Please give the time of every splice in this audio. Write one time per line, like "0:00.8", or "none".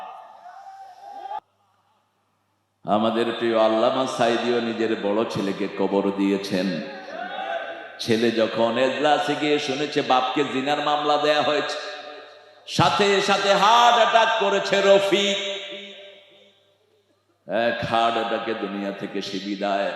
0:01.4